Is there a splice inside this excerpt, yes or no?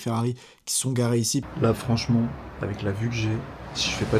yes